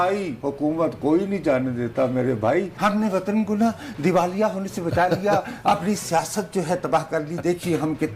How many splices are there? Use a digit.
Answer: 1